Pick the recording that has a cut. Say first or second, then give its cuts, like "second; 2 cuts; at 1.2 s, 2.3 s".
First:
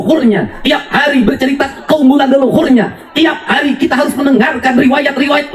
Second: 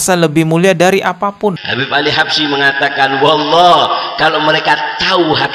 second; 1 cut; at 1.7 s